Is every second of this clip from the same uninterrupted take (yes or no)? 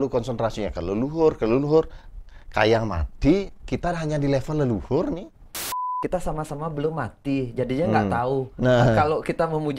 no